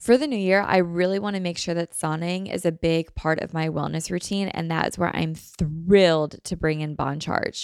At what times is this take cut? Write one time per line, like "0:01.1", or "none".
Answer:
none